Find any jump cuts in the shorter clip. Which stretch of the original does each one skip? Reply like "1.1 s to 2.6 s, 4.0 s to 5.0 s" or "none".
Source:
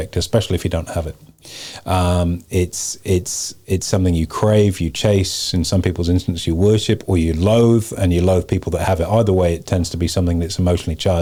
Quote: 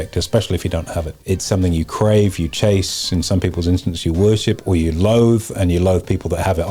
1.1 s to 3.6 s

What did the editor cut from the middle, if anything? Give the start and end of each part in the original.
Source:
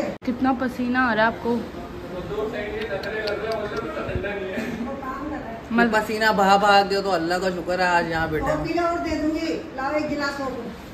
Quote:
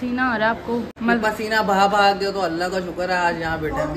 1.7 s to 5.6 s

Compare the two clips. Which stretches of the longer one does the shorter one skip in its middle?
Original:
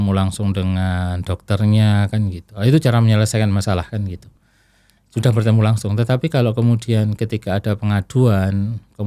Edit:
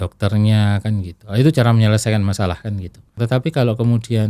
4.4 s to 5.9 s

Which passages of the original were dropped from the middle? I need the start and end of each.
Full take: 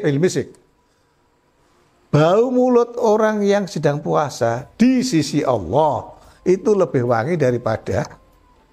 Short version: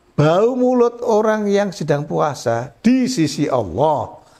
none

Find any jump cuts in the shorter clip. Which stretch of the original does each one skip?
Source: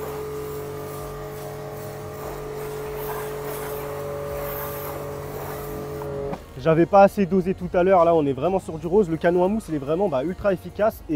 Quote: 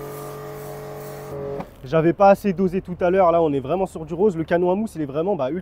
2.1 s to 6.0 s

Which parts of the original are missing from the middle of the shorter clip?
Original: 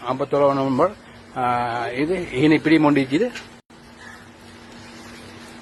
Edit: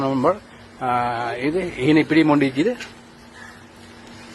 3.6 s to 3.7 s

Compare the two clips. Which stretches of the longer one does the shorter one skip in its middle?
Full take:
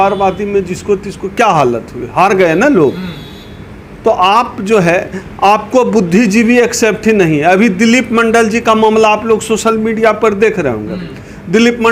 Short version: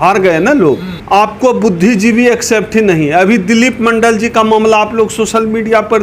3.1 s to 5.2 s

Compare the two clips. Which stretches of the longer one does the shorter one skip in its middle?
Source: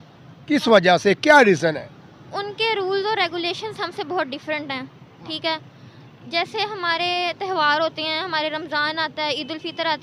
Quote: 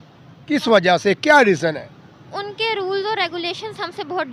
none

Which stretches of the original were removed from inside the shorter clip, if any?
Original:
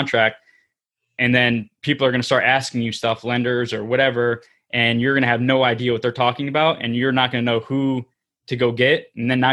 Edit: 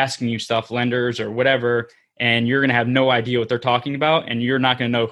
none

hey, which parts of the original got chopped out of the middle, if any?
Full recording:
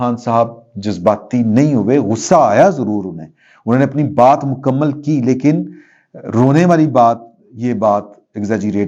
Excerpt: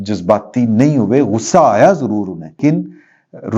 3.4 s to 5.4 s

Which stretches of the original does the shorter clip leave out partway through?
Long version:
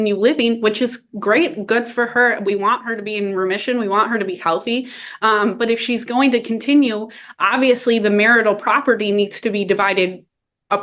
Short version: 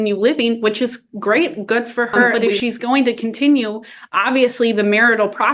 2.3 s to 5.6 s

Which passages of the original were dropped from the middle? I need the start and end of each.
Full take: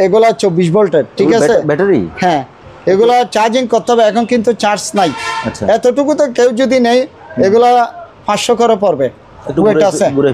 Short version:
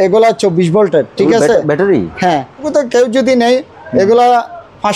2.7 s to 6.1 s

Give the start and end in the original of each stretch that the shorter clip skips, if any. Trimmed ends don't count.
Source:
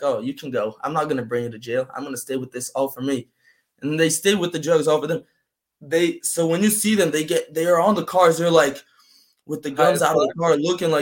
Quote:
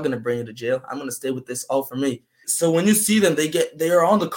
3.5 s to 6.2 s

